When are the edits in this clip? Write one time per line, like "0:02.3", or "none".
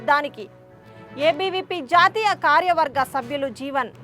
none